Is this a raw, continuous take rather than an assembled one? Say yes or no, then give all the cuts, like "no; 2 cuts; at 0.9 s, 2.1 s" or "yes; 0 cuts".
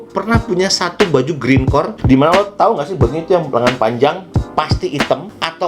no; 1 cut; at 2.0 s